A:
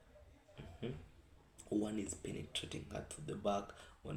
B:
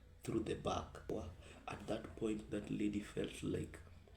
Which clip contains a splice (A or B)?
B